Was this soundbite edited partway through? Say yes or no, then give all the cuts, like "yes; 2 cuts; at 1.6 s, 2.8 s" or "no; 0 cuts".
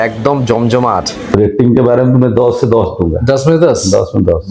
yes; 1 cut; at 1.3 s